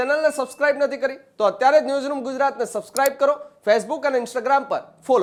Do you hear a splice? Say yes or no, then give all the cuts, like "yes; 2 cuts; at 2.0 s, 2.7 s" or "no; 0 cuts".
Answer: no; 0 cuts